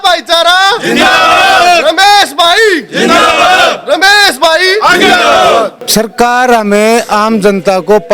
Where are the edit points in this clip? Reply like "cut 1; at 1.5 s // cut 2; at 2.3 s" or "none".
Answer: cut 1; at 5.8 s